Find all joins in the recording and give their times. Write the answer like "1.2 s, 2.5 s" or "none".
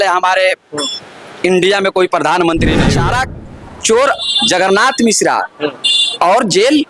2.8 s